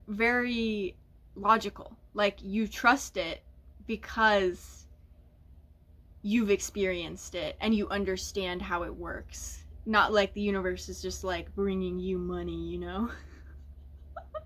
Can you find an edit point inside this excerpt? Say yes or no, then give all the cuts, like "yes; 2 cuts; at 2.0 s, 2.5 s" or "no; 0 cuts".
no; 0 cuts